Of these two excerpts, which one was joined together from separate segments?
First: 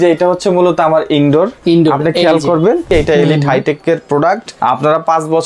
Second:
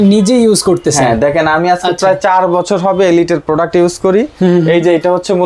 first; 3 cuts; at 1.6 s, 2.9 s, 4.5 s

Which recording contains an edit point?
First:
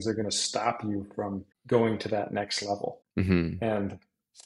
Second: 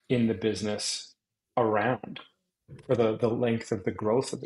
first; 2 cuts; at 1.5 s, 3.0 s

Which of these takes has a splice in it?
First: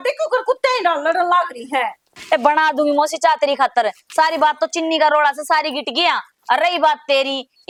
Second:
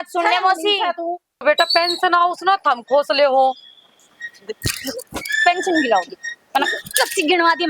second; 1 cut; at 1.3 s

